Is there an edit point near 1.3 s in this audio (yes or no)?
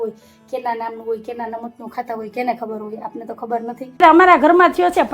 no